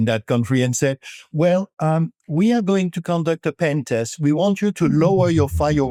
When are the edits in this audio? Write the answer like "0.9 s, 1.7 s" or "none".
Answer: none